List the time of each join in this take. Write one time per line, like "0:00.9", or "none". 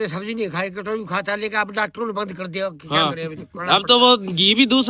none